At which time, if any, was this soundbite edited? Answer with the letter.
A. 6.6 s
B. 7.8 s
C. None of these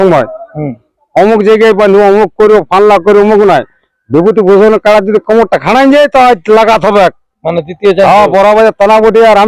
C